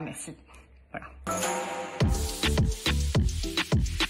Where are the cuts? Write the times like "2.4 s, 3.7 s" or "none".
1.1 s